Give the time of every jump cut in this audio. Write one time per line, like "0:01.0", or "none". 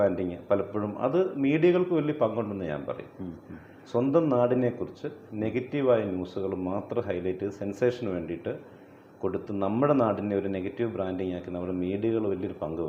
none